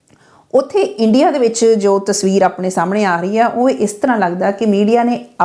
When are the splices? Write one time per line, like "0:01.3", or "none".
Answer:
none